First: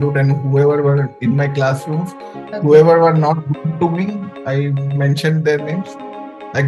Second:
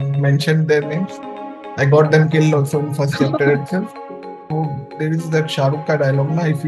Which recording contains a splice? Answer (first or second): second